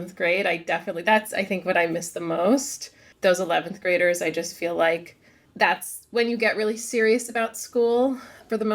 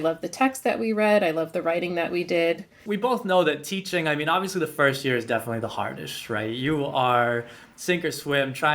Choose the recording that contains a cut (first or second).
second